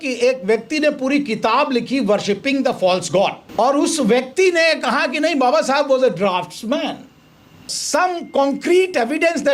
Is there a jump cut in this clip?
yes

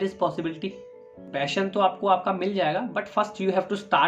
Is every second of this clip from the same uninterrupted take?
no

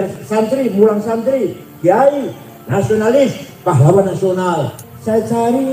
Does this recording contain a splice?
yes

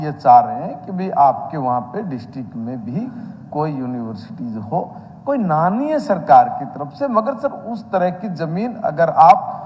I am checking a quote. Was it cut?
no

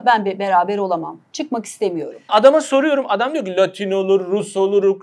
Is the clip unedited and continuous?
no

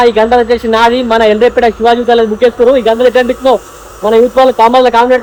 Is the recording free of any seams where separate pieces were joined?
yes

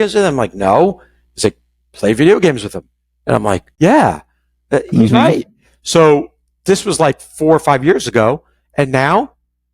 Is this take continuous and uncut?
no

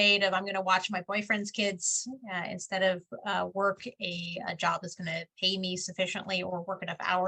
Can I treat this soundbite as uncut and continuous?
yes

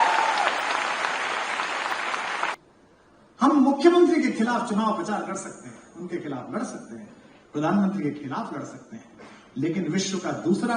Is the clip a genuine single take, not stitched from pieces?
no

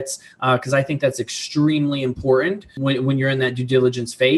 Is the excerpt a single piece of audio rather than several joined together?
no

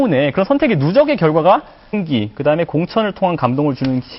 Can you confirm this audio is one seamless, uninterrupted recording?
yes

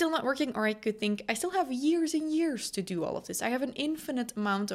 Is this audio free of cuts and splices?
yes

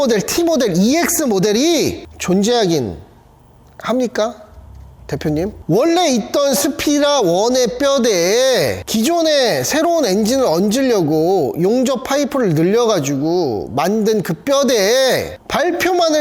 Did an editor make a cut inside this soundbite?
yes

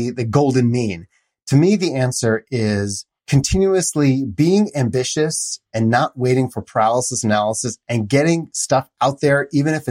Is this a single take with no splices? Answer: no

